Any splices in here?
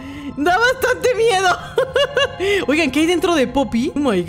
no; 0 cuts

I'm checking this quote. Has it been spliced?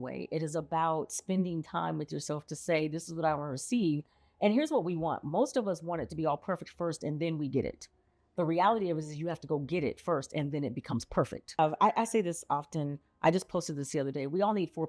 yes; 1 cut; at 11.6 s

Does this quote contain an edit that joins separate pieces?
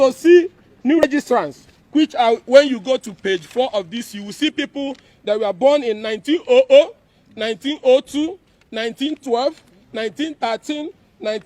yes; 1 cut; at 1.0 s

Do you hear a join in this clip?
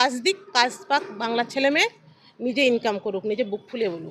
no; 0 cuts

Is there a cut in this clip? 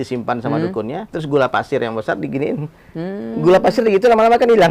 yes; 1 cut; at 1.1 s

